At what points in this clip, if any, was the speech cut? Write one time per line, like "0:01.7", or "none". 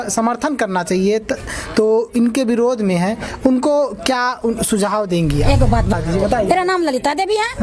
0:06.0